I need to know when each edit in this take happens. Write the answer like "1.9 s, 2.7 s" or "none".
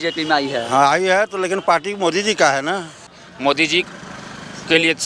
3.0 s